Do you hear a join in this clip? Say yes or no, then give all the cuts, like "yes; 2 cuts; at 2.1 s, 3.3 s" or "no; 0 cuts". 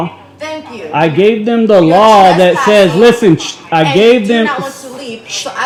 no; 0 cuts